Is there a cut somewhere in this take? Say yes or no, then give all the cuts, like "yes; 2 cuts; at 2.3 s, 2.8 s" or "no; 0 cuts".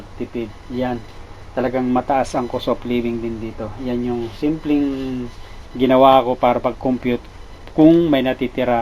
no; 0 cuts